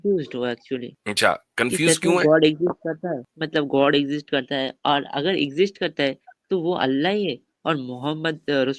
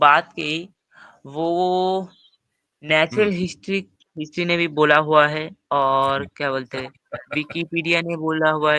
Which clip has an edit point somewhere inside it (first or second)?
first